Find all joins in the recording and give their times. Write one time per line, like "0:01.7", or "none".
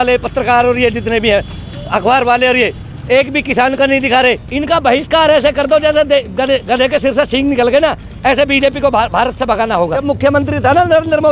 0:04.5
0:10.0